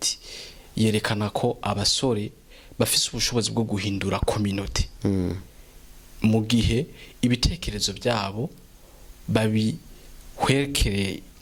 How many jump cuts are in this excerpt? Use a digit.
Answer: 0